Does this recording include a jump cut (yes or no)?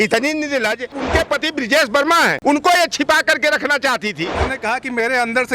yes